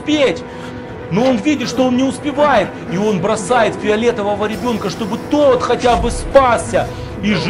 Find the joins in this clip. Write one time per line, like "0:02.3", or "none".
none